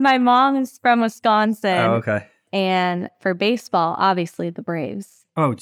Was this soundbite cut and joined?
yes; 1 cut; at 2.3 s

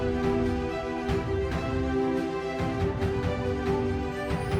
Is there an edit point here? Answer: no; 0 cuts

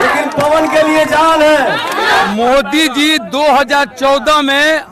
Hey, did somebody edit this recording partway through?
yes; 1 cut; at 2.3 s

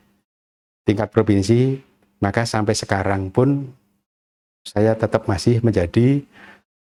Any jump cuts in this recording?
no; 0 cuts

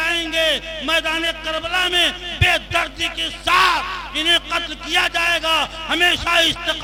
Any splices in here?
no; 0 cuts

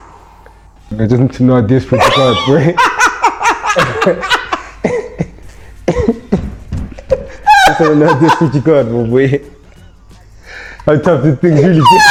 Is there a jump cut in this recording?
no; 0 cuts

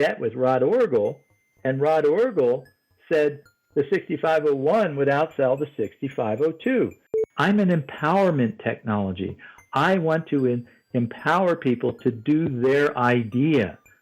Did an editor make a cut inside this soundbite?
yes; 1 cut; at 7.1 s

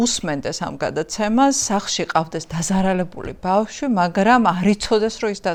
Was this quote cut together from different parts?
no; 0 cuts

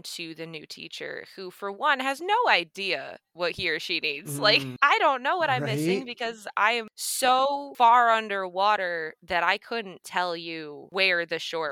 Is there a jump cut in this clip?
no; 0 cuts

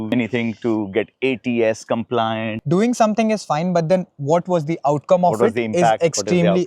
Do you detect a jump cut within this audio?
yes; 1 cut; at 2.6 s

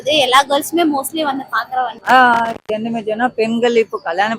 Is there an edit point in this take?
yes; 1 cut; at 2.0 s

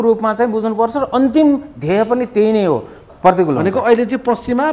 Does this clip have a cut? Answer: yes; 1 cut; at 3.0 s

